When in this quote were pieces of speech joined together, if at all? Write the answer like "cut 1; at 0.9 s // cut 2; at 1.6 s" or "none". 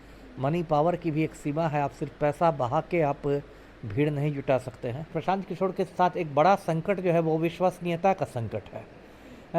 cut 1; at 5.1 s